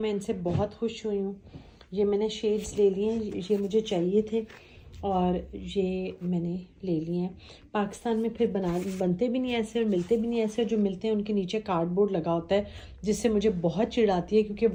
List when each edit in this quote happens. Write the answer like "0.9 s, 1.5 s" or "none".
none